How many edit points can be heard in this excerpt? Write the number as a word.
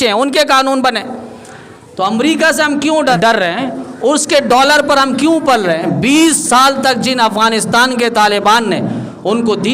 one